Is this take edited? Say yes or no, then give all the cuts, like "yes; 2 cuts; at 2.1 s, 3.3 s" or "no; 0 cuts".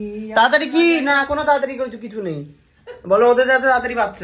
no; 0 cuts